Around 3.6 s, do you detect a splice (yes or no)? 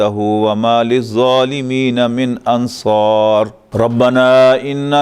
yes